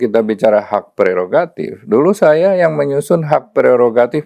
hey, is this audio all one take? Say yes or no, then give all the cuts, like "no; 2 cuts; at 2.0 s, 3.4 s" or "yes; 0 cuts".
yes; 0 cuts